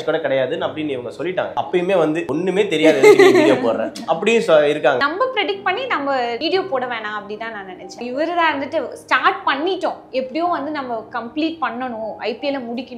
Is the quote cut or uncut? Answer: cut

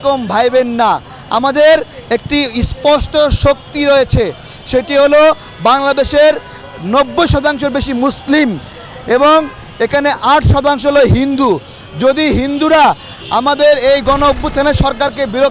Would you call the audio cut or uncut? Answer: uncut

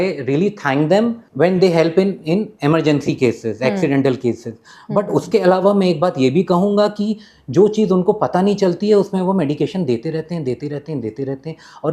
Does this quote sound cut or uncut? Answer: cut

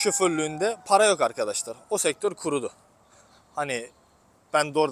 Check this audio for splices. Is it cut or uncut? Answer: uncut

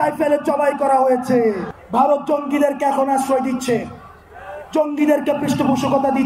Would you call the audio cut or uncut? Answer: cut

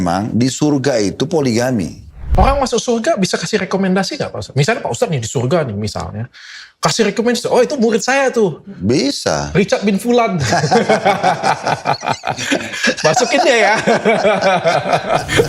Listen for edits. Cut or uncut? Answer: cut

